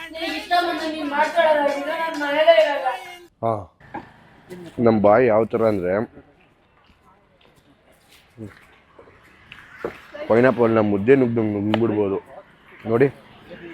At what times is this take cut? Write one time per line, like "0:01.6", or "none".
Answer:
0:03.7